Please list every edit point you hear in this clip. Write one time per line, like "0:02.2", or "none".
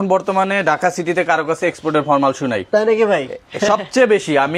none